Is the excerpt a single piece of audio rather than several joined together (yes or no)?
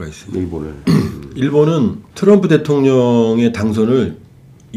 no